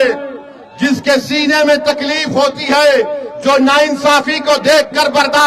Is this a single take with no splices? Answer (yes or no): yes